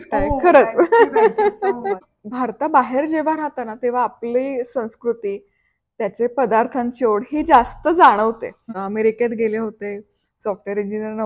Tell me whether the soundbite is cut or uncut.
cut